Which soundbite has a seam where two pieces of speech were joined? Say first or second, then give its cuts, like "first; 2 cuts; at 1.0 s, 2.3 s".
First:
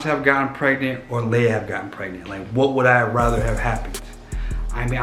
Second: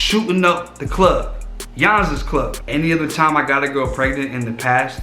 second; 1 cut; at 2.6 s